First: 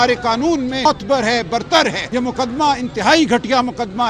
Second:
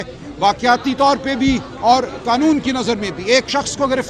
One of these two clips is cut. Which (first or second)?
first